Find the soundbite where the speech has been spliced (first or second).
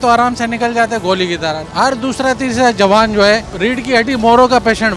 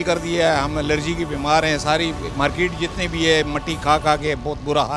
first